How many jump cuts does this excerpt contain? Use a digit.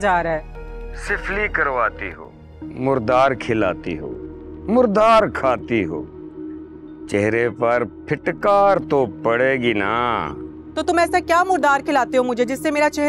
0